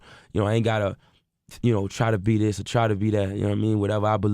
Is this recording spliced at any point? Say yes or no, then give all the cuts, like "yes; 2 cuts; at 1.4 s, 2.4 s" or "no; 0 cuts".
yes; 1 cut; at 1.0 s